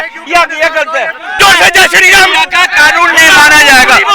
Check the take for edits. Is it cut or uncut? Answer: cut